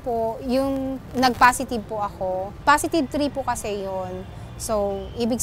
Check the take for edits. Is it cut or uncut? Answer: cut